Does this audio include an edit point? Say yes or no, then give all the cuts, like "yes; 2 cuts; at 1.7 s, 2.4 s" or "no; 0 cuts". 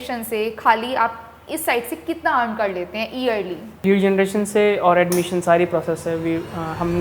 yes; 1 cut; at 3.8 s